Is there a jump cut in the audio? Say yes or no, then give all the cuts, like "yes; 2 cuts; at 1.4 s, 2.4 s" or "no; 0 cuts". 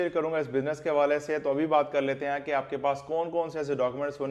no; 0 cuts